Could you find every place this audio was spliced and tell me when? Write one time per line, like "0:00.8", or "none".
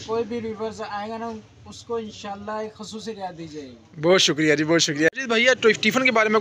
0:05.1